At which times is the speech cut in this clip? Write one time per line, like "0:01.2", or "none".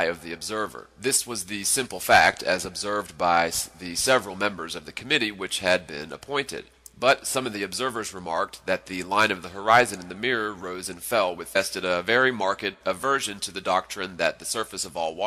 none